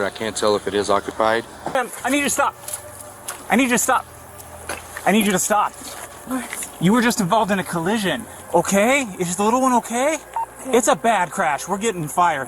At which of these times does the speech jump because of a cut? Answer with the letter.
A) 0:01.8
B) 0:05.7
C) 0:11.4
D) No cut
A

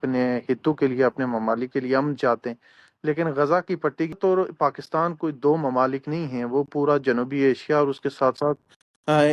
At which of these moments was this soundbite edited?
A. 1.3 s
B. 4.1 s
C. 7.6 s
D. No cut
B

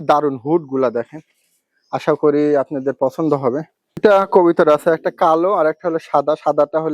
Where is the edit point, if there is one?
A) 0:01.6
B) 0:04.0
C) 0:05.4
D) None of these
B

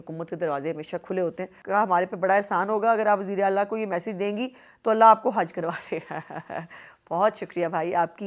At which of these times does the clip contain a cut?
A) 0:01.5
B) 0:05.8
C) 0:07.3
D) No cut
A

